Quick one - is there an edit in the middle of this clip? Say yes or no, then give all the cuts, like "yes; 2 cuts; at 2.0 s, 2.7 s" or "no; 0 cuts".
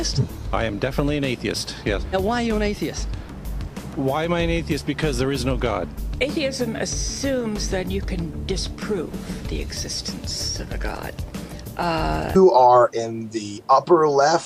no; 0 cuts